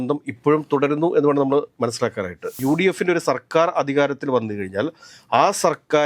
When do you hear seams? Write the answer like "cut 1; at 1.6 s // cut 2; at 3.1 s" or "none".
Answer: cut 1; at 2.5 s